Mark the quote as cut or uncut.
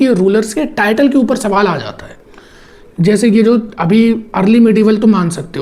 uncut